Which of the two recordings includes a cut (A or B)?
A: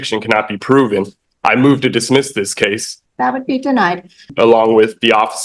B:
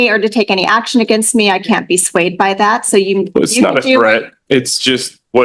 A